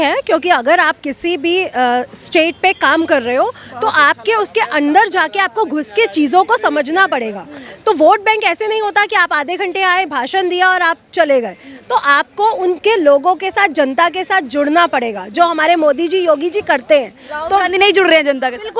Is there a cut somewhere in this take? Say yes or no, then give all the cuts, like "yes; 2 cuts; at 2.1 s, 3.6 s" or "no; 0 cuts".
no; 0 cuts